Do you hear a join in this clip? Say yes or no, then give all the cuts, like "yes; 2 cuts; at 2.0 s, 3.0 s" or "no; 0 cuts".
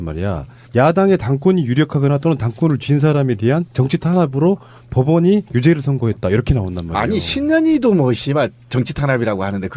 no; 0 cuts